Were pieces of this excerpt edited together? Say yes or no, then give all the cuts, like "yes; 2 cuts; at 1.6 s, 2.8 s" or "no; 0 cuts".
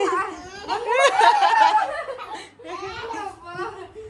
no; 0 cuts